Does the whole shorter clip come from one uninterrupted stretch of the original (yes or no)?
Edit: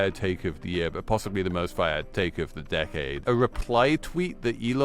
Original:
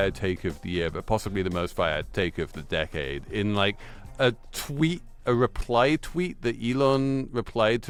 no